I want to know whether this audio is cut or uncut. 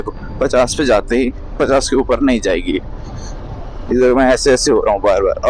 uncut